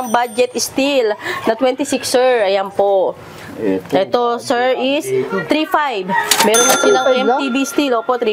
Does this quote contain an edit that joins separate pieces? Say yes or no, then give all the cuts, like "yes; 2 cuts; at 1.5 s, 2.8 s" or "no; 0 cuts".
no; 0 cuts